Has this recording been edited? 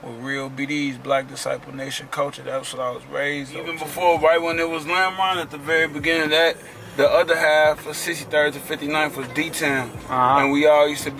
yes; 1 cut; at 3.8 s

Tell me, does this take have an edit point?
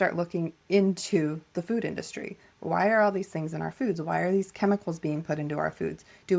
no; 0 cuts

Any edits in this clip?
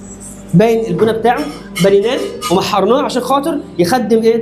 no; 0 cuts

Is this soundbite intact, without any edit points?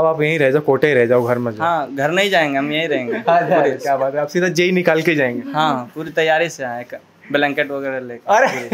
yes; 0 cuts

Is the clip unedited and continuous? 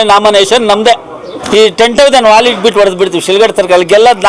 no; 1 cut; at 1.4 s

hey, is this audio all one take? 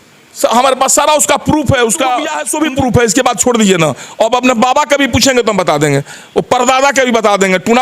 no; 1 cut; at 2.4 s

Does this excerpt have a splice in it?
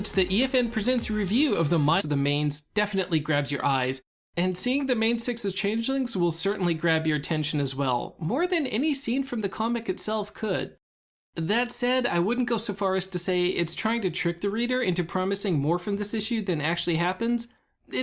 no; 0 cuts

